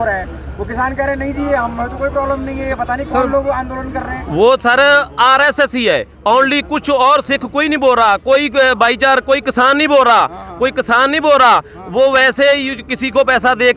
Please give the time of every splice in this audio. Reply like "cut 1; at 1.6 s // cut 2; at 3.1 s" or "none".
none

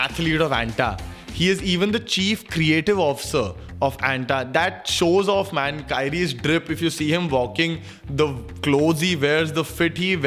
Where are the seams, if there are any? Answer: none

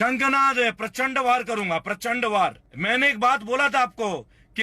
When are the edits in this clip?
cut 1; at 2.7 s

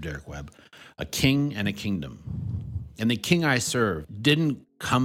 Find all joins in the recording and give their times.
cut 1; at 4.1 s

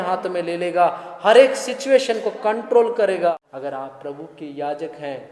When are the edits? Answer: cut 1; at 3.3 s

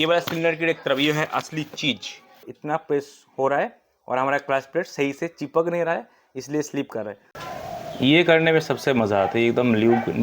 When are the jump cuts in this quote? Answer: cut 1; at 2.5 s // cut 2; at 7.2 s

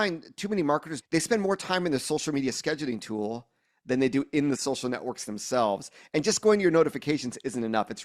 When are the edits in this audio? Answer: cut 1; at 0.9 s

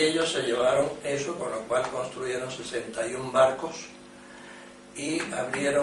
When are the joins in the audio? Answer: cut 1; at 4.8 s

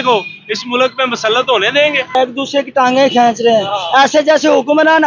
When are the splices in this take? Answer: cut 1; at 2.1 s

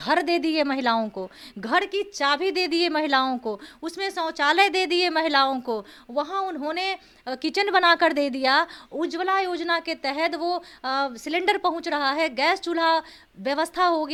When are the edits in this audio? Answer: none

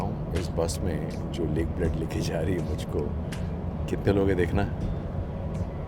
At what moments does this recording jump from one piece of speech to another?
none

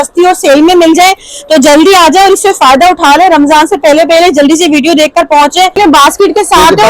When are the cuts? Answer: cut 1; at 5.7 s

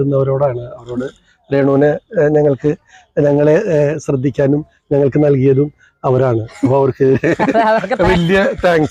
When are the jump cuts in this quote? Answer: none

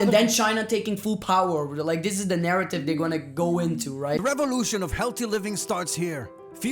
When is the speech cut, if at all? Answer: cut 1; at 4.2 s

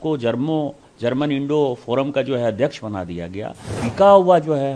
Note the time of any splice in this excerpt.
cut 1; at 3.7 s

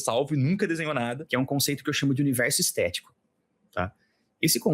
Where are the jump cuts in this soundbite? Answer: cut 1; at 1.2 s

